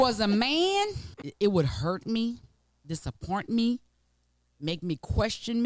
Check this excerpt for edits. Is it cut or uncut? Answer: cut